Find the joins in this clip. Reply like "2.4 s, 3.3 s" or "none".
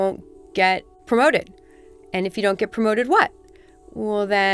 0.9 s

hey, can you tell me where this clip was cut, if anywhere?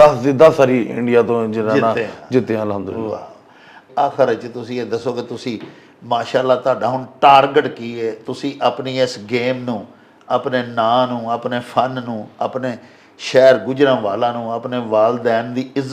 none

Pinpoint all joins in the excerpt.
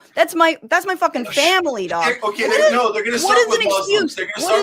2.2 s

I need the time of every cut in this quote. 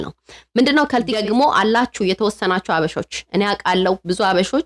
1.1 s

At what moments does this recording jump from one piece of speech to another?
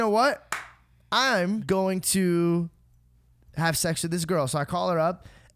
1.6 s

